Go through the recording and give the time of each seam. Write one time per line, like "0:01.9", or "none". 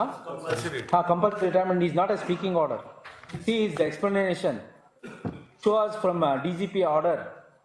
none